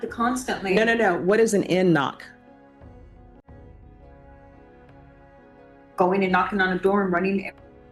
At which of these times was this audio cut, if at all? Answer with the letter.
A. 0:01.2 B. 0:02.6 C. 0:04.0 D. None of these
D